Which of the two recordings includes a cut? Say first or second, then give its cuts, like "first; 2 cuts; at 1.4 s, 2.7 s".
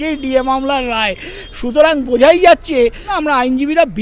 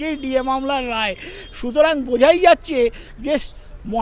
first; 1 cut; at 3.1 s